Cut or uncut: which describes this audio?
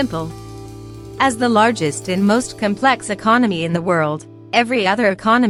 uncut